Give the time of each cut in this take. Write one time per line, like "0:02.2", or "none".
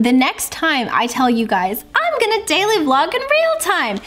none